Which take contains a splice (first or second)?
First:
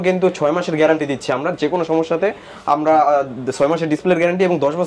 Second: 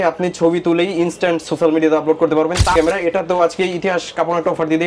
second